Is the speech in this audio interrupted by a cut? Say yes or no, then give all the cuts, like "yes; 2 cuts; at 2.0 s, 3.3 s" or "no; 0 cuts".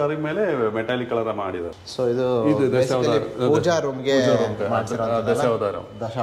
yes; 1 cut; at 1.7 s